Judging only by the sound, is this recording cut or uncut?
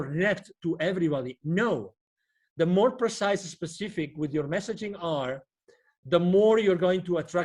uncut